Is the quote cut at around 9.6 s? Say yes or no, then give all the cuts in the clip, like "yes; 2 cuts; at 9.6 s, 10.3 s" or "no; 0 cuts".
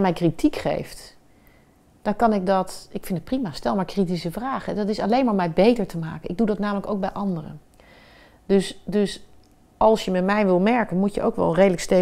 no; 0 cuts